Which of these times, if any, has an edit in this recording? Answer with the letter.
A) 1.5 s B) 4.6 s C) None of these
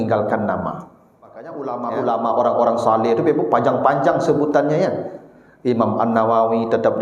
A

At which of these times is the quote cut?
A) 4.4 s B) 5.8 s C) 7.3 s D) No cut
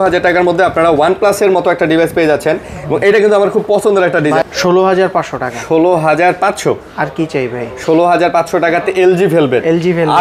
A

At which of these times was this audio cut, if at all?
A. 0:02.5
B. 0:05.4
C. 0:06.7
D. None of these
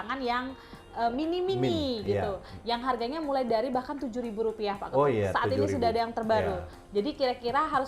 C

